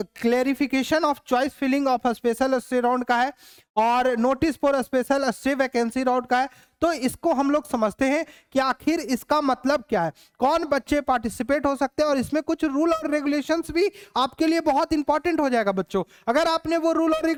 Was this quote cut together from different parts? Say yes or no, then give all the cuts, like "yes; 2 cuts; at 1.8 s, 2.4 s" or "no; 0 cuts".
no; 0 cuts